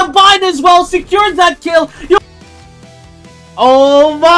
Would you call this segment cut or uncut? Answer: cut